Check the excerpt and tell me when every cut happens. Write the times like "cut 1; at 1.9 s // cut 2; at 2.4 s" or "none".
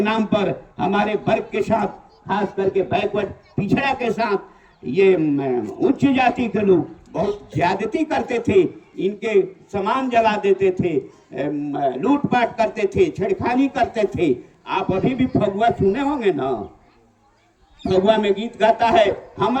none